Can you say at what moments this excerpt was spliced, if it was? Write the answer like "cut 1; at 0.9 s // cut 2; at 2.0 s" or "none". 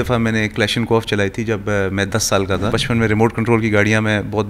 cut 1; at 2.8 s